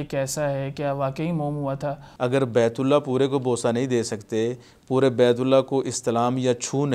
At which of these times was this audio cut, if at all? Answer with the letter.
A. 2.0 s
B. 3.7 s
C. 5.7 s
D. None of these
A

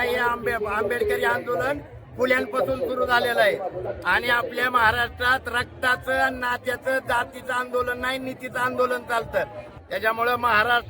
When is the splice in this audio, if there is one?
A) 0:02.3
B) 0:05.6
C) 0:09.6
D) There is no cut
C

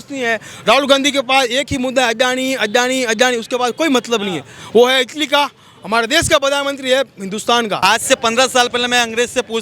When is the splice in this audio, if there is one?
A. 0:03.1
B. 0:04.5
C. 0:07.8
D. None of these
C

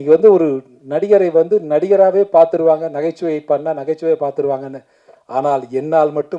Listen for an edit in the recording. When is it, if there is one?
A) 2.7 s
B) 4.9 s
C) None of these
C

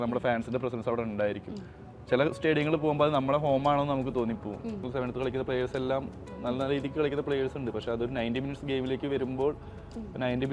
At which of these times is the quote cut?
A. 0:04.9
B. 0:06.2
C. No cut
A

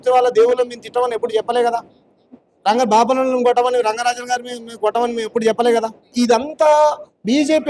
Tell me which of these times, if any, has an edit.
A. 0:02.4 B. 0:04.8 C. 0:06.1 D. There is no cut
C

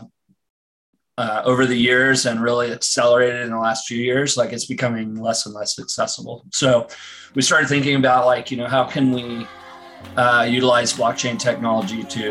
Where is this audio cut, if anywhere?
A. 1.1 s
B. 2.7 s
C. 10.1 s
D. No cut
D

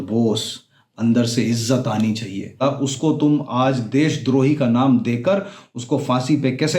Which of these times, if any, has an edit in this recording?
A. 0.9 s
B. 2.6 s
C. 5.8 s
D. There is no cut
B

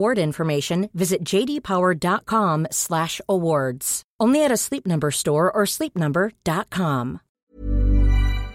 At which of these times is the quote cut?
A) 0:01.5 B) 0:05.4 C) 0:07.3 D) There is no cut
C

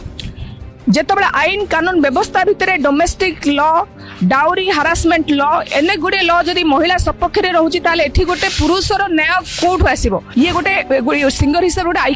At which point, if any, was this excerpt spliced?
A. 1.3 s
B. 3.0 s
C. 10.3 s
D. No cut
C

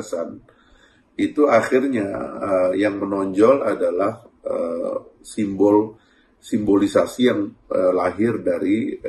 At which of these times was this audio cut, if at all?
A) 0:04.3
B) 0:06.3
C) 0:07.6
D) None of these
D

